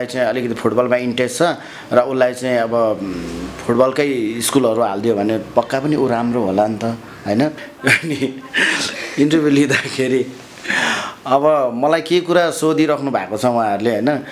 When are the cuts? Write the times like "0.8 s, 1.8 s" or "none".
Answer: 7.7 s